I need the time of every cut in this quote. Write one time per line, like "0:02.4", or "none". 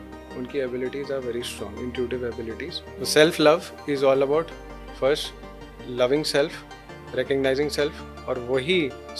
0:02.8